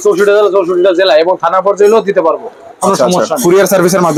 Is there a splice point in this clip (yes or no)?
no